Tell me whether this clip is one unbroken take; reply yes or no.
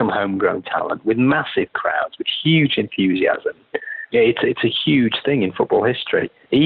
no